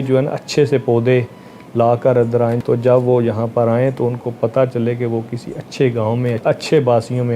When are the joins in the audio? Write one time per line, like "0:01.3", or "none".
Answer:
0:02.6
0:06.4